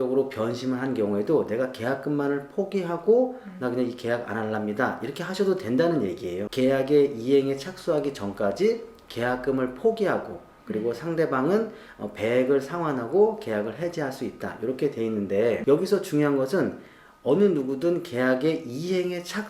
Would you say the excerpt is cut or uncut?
cut